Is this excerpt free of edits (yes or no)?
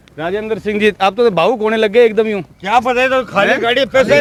yes